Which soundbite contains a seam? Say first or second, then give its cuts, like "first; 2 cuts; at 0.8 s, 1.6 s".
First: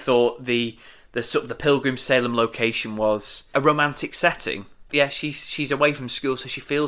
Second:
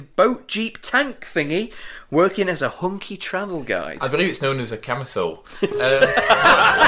first; 2 cuts; at 3.4 s, 4.9 s